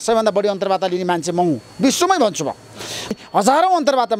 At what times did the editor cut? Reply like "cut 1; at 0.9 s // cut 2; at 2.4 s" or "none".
cut 1; at 3.1 s